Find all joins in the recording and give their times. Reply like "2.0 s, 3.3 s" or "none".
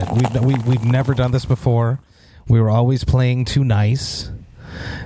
none